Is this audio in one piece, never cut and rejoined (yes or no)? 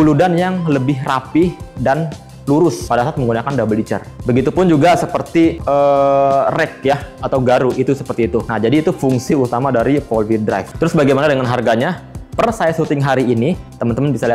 no